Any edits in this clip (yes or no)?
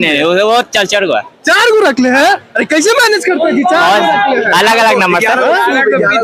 no